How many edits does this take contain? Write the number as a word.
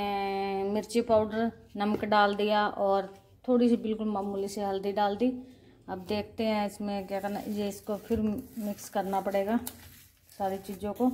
zero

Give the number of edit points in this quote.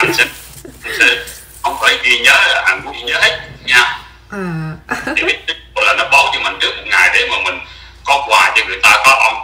one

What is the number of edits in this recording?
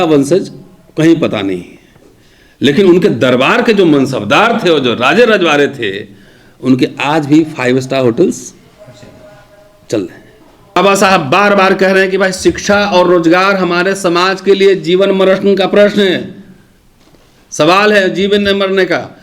one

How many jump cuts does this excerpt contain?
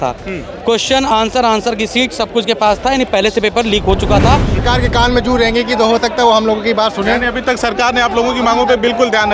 one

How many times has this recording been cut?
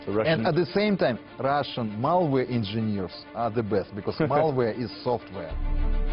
one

